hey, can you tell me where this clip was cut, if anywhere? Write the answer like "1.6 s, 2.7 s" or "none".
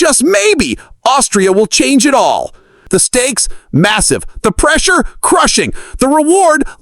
2.7 s